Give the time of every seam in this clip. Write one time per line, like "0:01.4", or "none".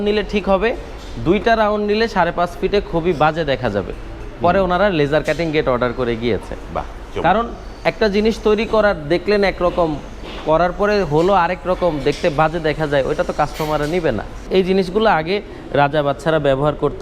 0:14.4